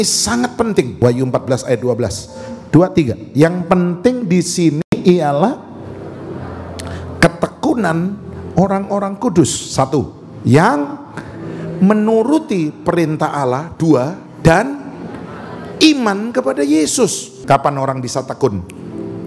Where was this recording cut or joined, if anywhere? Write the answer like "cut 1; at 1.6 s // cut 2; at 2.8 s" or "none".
cut 1; at 0.9 s // cut 2; at 17.3 s